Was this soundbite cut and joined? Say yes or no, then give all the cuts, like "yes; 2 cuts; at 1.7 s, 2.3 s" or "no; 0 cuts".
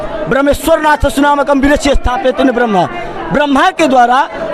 no; 0 cuts